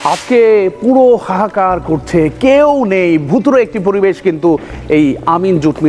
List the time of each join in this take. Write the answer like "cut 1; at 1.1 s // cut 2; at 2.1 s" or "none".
none